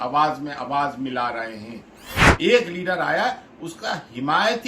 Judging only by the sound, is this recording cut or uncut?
cut